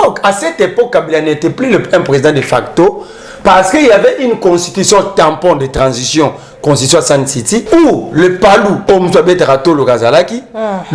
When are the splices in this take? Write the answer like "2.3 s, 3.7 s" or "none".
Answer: 7.6 s, 8.8 s